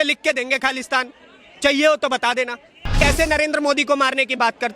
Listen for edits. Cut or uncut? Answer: cut